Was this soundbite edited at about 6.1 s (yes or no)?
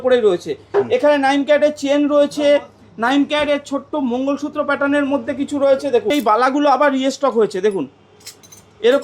yes